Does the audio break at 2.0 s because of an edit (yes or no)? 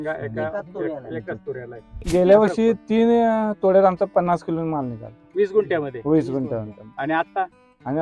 yes